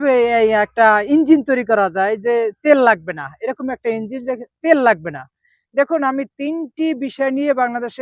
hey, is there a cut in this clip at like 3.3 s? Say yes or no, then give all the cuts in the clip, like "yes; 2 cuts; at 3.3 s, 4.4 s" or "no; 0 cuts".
no; 0 cuts